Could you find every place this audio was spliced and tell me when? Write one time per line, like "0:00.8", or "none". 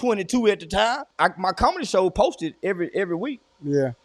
0:01.1